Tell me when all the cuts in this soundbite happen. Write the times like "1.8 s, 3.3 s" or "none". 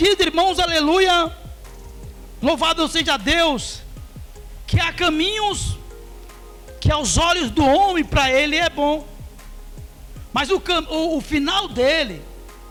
none